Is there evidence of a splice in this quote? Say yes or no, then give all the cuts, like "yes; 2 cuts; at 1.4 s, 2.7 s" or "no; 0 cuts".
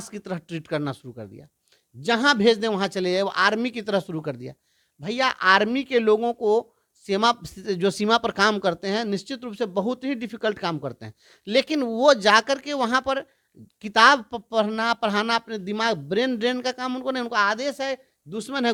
no; 0 cuts